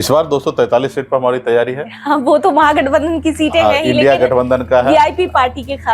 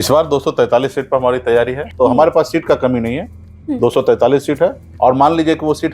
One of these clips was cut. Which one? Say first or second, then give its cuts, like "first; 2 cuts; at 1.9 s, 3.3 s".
second; 2 cuts; at 1.9 s, 4.8 s